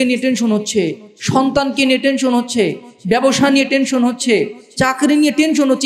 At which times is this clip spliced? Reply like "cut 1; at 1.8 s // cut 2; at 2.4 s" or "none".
none

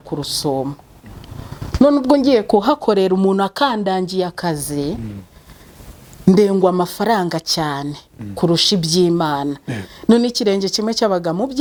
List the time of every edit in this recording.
none

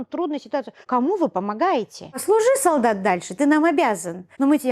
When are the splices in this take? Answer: cut 1; at 2.2 s

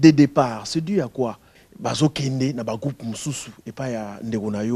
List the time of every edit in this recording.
cut 1; at 1.6 s

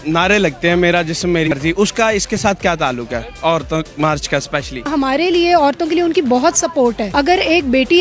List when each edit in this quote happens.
cut 1; at 1.5 s // cut 2; at 4.8 s // cut 3; at 7.0 s

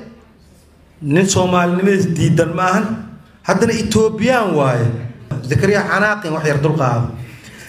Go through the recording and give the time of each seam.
cut 1; at 5.4 s

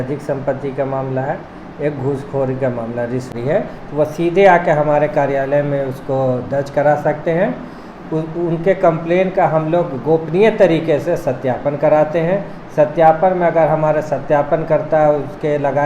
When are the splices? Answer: cut 1; at 3.3 s

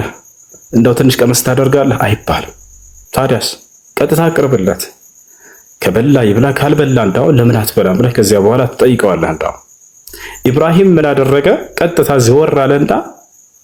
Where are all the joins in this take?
none

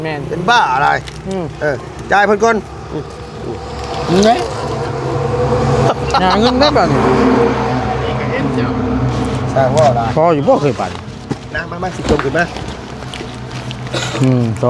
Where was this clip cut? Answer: none

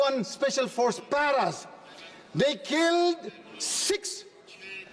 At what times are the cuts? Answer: none

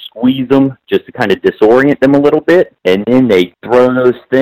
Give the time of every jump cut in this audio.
cut 1; at 2.8 s // cut 2; at 3.6 s

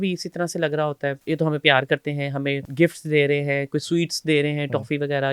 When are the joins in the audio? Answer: cut 1; at 1.2 s // cut 2; at 2.7 s

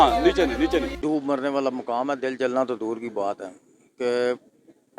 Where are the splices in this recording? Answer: cut 1; at 0.9 s

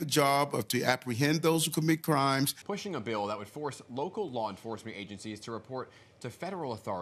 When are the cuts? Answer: none

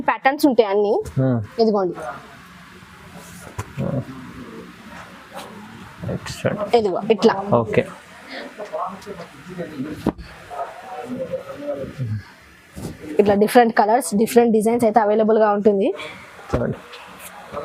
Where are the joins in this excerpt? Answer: none

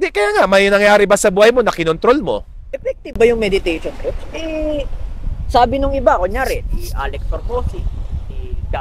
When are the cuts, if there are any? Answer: cut 1; at 2.7 s

